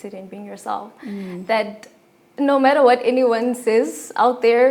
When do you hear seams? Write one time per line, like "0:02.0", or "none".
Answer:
none